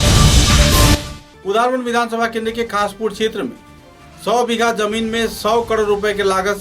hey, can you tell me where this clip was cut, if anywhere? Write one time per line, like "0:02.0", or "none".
0:01.0